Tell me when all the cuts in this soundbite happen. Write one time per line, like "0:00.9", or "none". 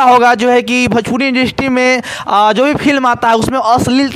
none